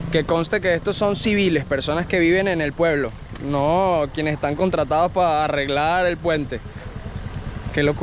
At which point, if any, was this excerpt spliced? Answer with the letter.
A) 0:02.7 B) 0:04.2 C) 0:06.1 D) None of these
D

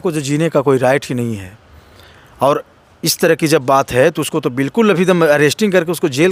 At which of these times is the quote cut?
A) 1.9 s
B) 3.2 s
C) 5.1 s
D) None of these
D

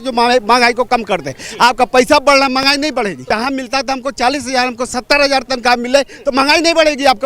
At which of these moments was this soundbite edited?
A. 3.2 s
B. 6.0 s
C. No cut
A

